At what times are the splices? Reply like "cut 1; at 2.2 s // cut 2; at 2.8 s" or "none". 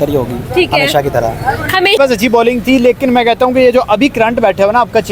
cut 1; at 2.0 s

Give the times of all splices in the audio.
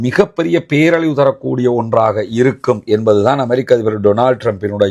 none

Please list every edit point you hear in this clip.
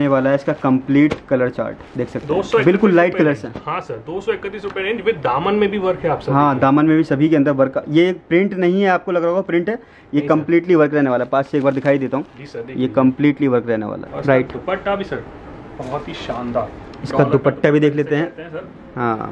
cut 1; at 14.1 s

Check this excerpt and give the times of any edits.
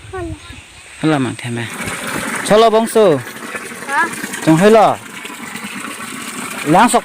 cut 1; at 1.8 s

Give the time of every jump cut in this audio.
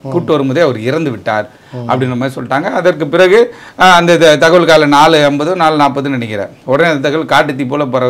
none

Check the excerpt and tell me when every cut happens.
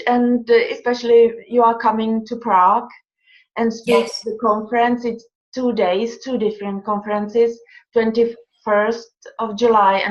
cut 1; at 2.3 s

